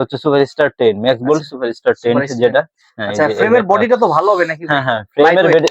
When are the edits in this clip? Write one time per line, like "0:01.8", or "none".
none